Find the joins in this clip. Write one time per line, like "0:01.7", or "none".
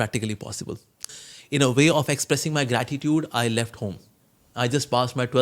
0:01.2

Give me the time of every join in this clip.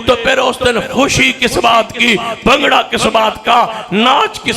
none

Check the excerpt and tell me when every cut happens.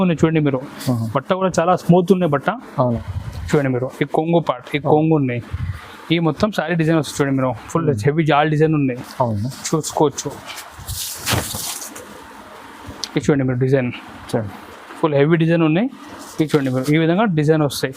0:03.0

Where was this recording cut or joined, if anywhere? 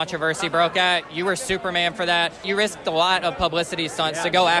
0:02.4

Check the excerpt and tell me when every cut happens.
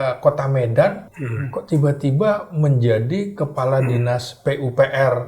0:01.1

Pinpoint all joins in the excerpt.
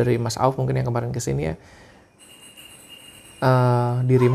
none

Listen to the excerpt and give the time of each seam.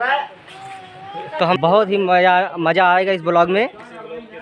0:01.6

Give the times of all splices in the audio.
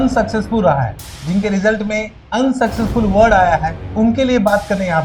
0:02.2

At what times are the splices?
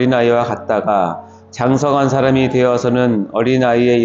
none

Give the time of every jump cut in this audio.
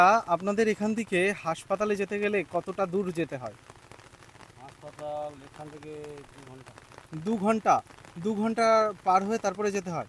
none

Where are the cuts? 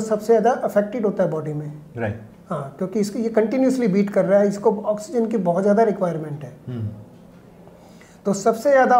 none

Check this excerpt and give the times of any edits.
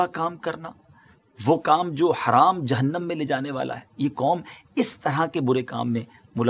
none

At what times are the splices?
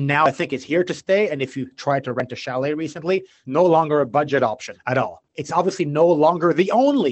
0:05.3

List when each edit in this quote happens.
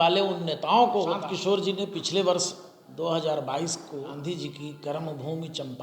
0:01.2
0:04.1

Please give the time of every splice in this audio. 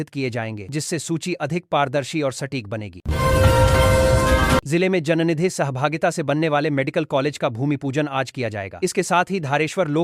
0:03.0
0:04.7

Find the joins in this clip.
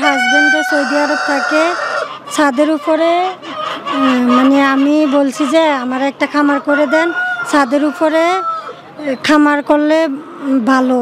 none

